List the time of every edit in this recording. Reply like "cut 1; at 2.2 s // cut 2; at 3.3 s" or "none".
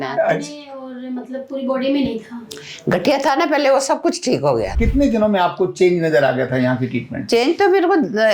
cut 1; at 4.8 s